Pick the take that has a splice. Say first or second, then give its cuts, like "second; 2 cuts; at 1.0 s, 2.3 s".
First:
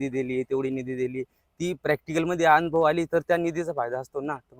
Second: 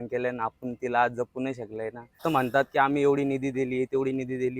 second; 1 cut; at 2.2 s